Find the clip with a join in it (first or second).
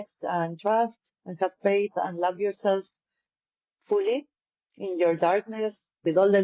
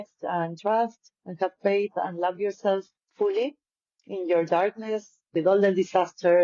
second